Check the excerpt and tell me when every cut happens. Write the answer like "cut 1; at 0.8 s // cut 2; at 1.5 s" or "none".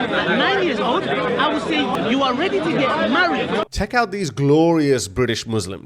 cut 1; at 1.9 s // cut 2; at 3.7 s